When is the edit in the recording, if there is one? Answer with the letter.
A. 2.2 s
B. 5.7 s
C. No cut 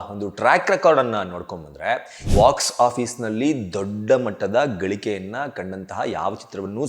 A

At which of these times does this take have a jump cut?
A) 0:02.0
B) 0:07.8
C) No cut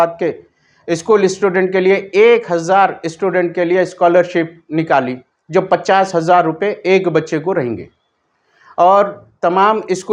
C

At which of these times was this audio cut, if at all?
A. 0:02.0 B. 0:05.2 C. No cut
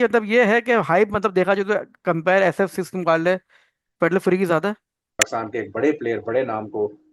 B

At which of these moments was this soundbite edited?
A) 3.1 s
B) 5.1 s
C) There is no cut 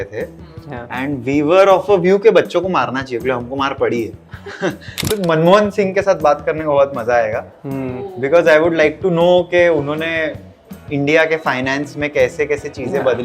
B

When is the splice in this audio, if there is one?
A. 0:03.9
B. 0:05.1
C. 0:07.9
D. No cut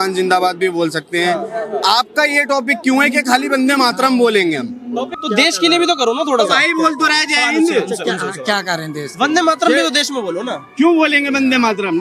B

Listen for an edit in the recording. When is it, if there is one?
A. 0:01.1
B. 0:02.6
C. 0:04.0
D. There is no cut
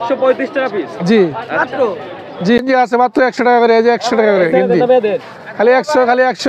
B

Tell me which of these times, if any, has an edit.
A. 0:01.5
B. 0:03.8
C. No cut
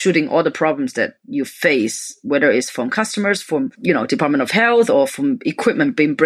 B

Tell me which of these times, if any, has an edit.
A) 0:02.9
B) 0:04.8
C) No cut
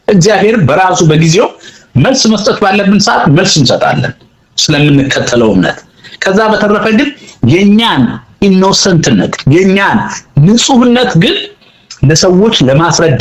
C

